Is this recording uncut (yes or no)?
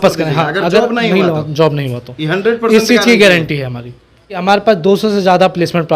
no